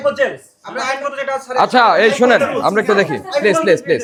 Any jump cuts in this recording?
no; 0 cuts

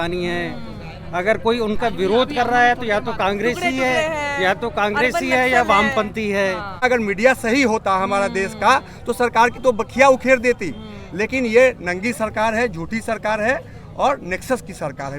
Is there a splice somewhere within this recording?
yes; 1 cut; at 6.8 s

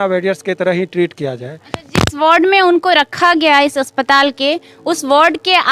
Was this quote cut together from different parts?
no; 0 cuts

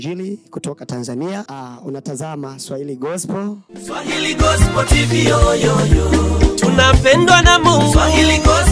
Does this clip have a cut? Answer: yes; 2 cuts; at 1.5 s, 3.7 s

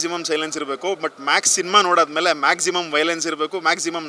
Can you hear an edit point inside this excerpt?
no; 0 cuts

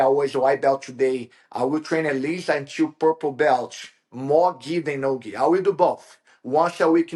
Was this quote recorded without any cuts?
yes; 0 cuts

